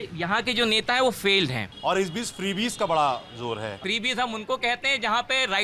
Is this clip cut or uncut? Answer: cut